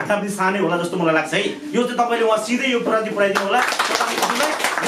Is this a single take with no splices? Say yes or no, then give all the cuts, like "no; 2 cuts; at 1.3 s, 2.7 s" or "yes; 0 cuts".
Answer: yes; 0 cuts